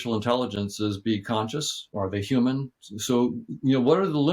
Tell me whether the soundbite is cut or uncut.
cut